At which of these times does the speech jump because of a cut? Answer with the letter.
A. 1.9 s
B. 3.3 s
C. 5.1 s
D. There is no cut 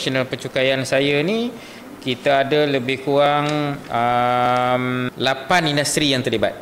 C